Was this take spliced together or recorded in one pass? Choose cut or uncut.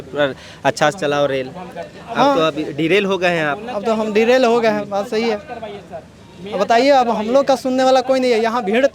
uncut